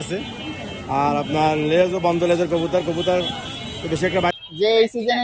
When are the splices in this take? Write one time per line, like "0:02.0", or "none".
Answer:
0:04.4